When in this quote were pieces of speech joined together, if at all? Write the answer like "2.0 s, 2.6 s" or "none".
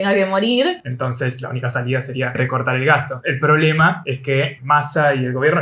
0.9 s, 2.6 s, 4.4 s